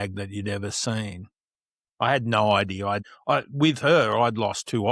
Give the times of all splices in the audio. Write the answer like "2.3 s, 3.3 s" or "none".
3.0 s